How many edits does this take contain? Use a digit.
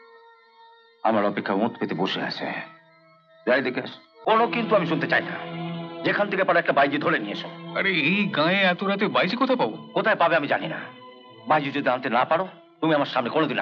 1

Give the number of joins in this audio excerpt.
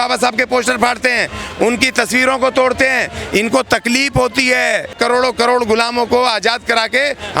1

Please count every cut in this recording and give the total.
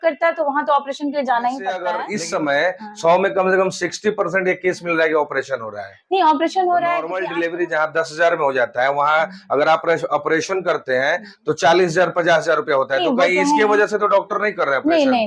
2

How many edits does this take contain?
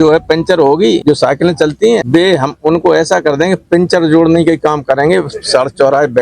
2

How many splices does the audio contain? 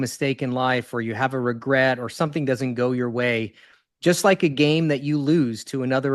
0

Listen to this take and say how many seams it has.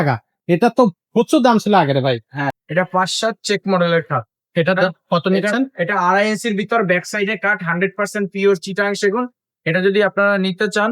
1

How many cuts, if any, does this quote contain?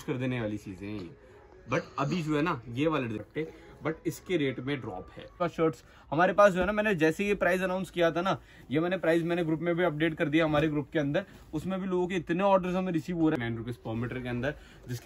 3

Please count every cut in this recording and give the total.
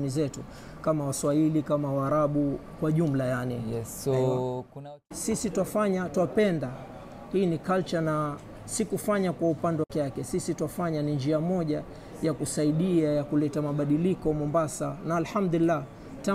2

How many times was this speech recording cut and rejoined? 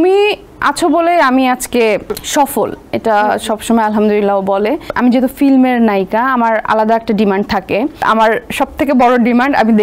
3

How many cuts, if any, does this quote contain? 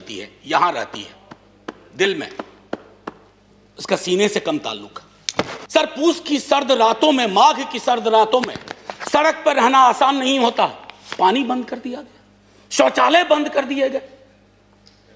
1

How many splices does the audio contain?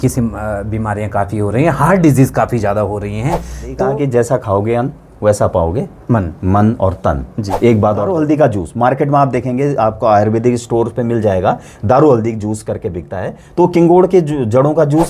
2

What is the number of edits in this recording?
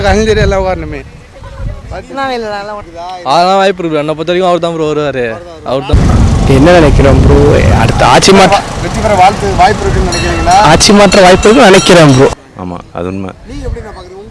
3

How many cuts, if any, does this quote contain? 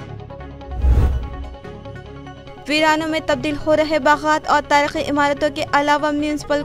1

